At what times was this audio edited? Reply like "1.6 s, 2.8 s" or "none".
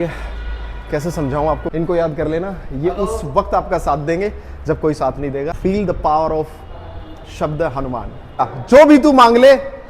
1.7 s, 5.6 s, 8.5 s